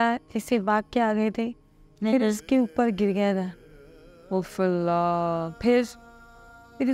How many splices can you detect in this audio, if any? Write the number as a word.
zero